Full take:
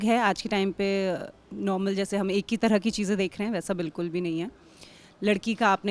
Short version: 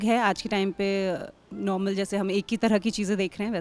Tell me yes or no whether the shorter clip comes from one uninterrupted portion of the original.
yes